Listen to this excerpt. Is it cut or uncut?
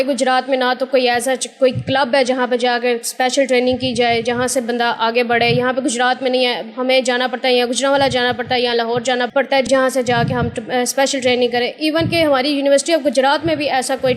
uncut